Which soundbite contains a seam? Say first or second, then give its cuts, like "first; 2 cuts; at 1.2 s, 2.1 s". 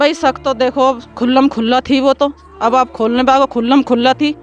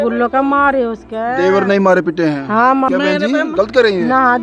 second; 1 cut; at 2.9 s